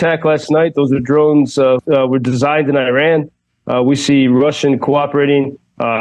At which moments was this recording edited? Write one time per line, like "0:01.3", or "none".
0:01.8